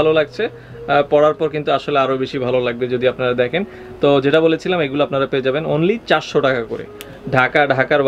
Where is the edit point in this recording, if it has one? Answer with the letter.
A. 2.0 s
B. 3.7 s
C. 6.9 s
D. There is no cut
D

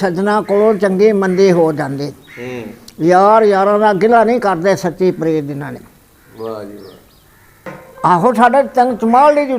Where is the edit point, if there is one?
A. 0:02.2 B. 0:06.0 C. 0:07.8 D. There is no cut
C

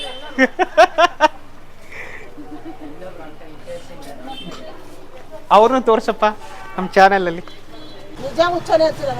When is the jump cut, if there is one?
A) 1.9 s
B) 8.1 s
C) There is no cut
B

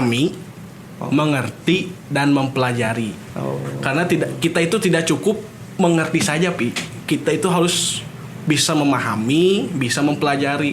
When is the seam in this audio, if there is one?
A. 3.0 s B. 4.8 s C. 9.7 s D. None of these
D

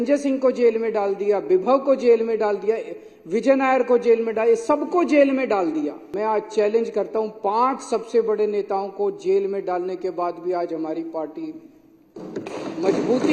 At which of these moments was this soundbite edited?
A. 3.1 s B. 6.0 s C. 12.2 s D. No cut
B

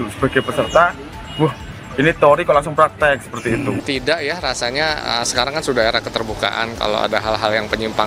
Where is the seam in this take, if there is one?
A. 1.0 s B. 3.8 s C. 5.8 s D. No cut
B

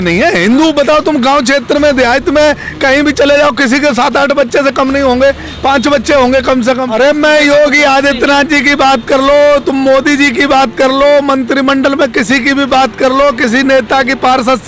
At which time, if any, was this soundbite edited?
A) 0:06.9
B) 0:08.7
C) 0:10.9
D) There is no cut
A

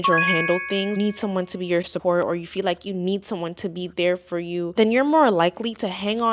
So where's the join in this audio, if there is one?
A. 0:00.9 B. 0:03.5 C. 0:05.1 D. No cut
A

